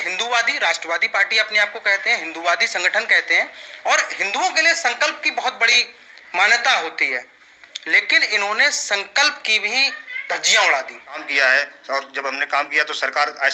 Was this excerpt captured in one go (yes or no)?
no